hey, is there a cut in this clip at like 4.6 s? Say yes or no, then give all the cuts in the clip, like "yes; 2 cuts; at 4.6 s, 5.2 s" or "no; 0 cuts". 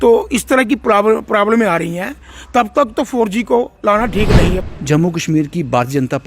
yes; 1 cut; at 4.6 s